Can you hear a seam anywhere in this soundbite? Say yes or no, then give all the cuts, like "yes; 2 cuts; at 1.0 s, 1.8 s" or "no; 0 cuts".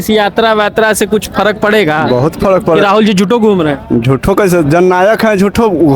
no; 0 cuts